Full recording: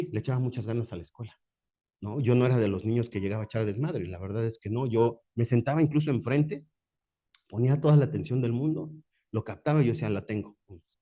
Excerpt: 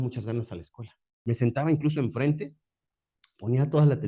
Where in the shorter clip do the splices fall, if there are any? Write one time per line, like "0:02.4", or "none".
0:01.1